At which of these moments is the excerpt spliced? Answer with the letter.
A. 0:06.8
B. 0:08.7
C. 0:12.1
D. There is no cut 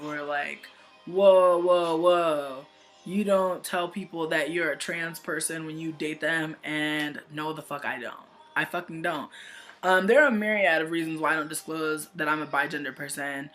C